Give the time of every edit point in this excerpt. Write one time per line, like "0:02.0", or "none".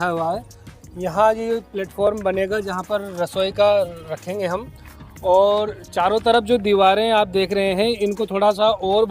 none